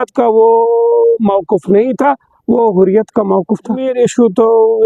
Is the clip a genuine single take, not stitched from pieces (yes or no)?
no